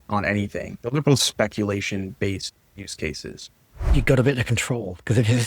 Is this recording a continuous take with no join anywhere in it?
no; 1 cut; at 3.9 s

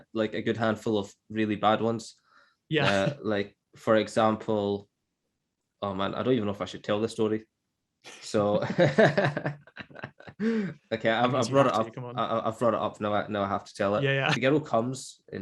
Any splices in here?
yes; 1 cut; at 14.4 s

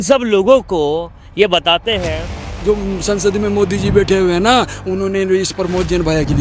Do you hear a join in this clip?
yes; 1 cut; at 2.5 s

